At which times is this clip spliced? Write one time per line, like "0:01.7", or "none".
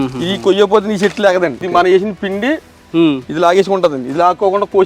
0:01.7